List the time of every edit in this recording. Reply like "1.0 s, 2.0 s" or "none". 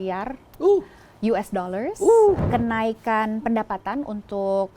2.4 s